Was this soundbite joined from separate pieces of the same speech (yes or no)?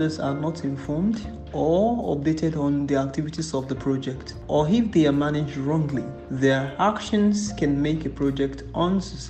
no